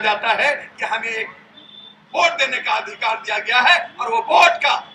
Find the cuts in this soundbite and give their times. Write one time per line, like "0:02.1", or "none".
none